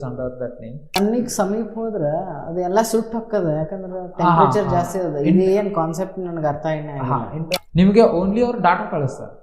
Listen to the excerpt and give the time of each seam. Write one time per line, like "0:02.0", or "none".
0:01.0
0:07.6